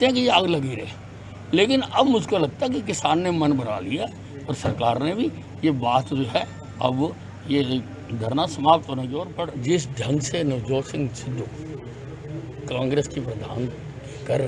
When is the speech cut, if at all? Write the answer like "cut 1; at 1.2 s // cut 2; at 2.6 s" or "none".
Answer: cut 1; at 9.2 s